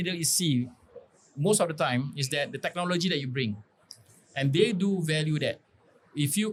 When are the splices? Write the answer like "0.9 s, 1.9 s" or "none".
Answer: none